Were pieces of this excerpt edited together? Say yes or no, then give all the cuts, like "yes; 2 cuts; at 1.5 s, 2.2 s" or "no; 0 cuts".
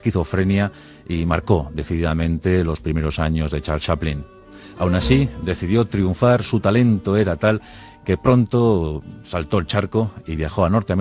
yes; 1 cut; at 8.2 s